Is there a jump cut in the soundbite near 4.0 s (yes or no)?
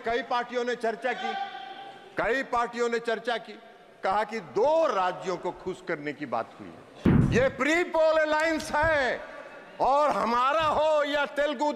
no